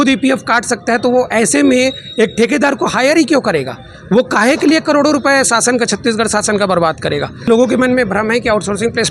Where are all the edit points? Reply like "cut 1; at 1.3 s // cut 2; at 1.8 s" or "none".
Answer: cut 1; at 7.5 s